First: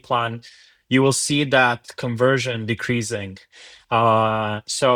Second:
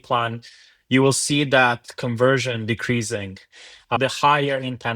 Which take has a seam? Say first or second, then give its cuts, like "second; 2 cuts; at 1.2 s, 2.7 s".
second; 1 cut; at 4.0 s